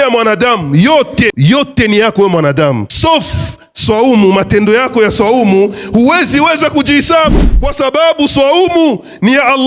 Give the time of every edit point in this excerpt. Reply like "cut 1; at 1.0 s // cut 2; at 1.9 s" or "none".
cut 1; at 1.3 s // cut 2; at 2.9 s // cut 3; at 7.3 s